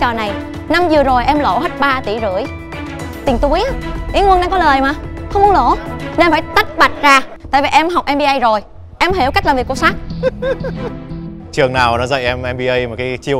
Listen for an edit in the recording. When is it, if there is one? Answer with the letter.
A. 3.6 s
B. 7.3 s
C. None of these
B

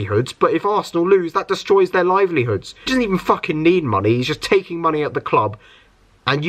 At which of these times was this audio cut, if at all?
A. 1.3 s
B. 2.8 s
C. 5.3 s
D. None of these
B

